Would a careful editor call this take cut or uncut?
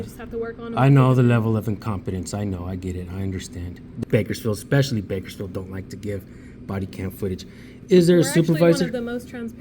cut